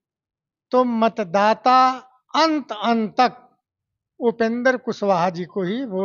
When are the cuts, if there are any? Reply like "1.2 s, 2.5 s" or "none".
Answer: none